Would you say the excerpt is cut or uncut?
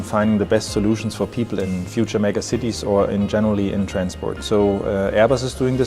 cut